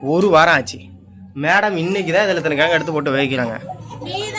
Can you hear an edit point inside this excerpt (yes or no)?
no